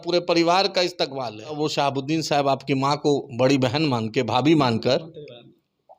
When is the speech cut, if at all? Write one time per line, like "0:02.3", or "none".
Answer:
0:01.6